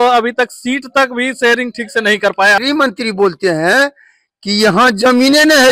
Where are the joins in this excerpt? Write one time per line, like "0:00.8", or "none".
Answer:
0:02.6